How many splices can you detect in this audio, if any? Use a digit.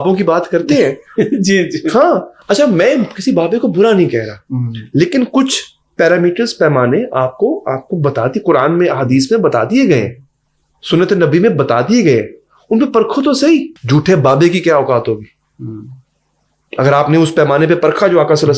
0